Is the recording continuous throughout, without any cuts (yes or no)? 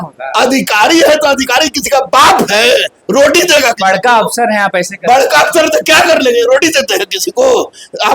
yes